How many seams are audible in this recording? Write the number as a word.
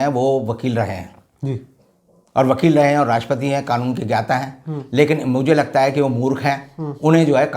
zero